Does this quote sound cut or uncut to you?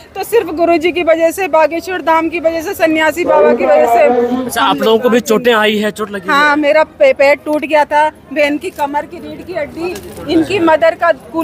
cut